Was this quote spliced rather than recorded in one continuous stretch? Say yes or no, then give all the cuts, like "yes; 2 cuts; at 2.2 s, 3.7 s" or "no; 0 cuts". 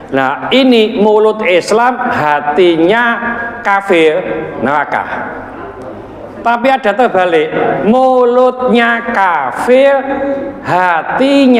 yes; 1 cut; at 7.8 s